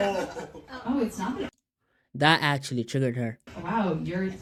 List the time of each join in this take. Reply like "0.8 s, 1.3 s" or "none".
none